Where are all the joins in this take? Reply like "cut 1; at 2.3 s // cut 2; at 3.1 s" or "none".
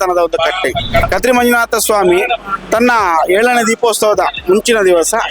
cut 1; at 1.1 s